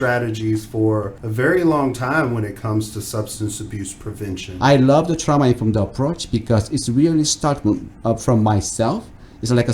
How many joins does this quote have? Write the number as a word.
two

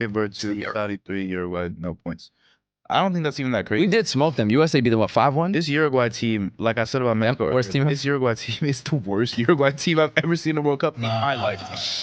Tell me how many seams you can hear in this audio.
zero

